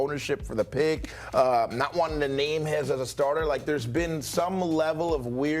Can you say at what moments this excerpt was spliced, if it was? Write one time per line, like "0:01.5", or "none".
0:01.1